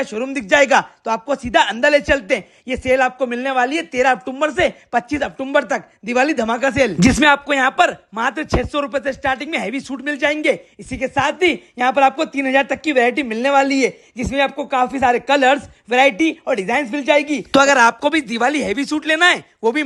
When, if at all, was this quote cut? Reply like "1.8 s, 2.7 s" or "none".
none